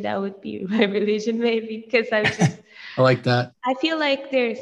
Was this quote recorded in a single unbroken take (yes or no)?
no